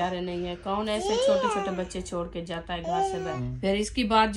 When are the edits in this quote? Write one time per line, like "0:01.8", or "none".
0:03.4